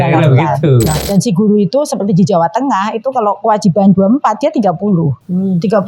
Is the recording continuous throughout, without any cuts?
no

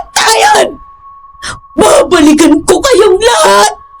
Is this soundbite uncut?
yes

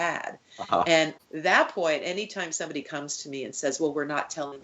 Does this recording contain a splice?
yes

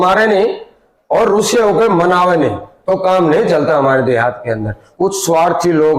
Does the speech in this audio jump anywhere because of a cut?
yes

